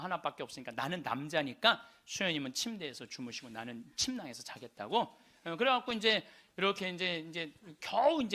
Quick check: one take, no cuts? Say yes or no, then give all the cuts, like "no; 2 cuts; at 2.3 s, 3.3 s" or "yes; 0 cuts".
yes; 0 cuts